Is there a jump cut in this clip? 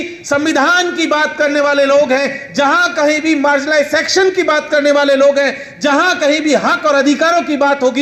no; 0 cuts

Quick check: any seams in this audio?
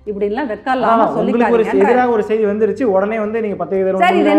no; 0 cuts

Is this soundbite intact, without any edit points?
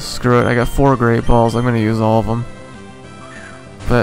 yes; 0 cuts

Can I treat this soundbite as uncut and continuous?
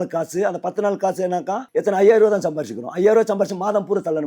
no; 1 cut; at 1.6 s

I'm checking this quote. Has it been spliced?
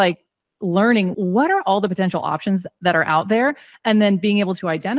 yes; 1 cut; at 1.1 s

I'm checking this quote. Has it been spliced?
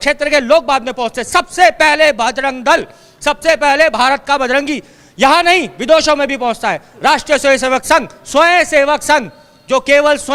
no; 0 cuts

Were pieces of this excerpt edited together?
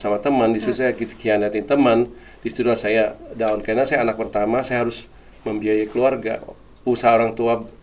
no; 0 cuts

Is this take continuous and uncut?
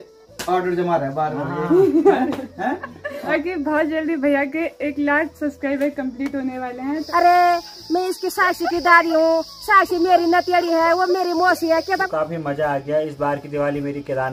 no; 3 cuts; at 3.3 s, 7.0 s, 12.1 s

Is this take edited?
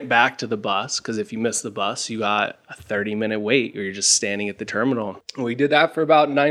no; 0 cuts

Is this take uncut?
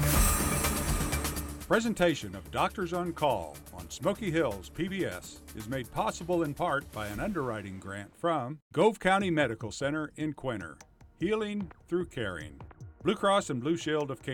no; 2 cuts; at 1.5 s, 8.6 s

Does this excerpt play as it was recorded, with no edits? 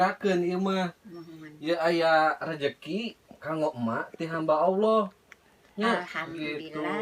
yes; 0 cuts

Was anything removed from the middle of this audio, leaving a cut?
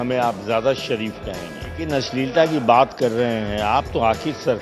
yes; 1 cut; at 1.8 s

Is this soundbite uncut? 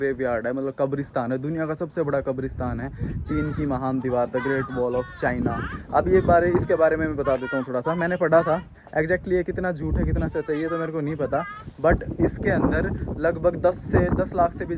yes; 0 cuts

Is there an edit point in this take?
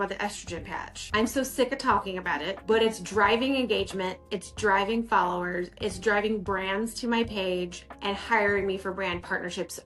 no; 0 cuts

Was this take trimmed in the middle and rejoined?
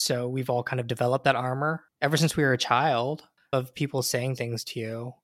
yes; 2 cuts; at 1.9 s, 3.5 s

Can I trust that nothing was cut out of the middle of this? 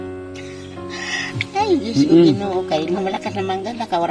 yes; 0 cuts

